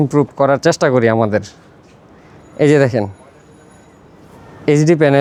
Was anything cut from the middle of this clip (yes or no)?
no